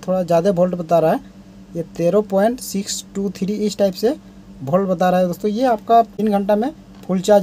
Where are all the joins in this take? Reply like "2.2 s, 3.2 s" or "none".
6.1 s